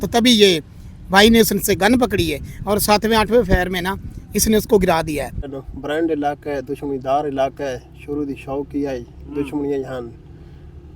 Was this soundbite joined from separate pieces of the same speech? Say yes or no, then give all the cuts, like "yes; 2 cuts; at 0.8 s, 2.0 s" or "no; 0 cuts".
yes; 1 cut; at 5.5 s